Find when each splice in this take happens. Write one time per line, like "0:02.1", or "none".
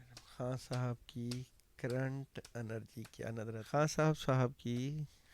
0:03.7